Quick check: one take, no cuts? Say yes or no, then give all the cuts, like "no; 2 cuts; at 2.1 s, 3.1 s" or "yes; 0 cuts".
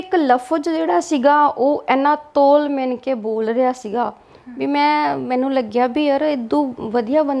yes; 0 cuts